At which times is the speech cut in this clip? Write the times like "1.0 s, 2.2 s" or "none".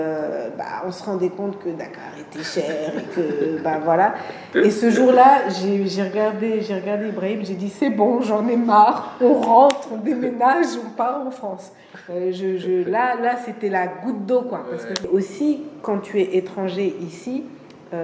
15.0 s